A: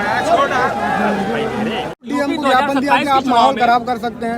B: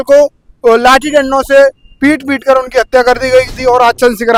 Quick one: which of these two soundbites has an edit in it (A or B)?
A